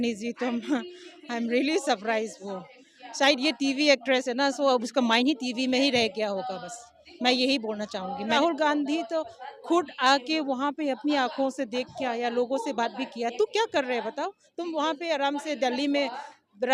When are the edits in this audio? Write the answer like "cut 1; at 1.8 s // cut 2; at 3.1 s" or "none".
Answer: cut 1; at 8.4 s